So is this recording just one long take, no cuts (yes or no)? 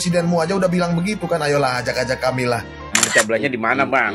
no